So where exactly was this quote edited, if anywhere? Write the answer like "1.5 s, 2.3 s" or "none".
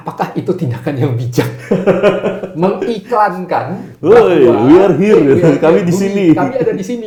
none